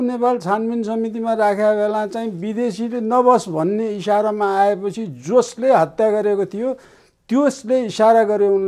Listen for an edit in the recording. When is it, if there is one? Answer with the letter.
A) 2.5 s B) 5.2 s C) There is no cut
C